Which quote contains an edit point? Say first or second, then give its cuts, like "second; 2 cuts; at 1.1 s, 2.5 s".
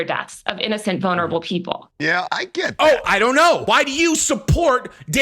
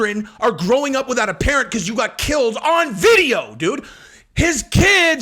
first; 1 cut; at 3.6 s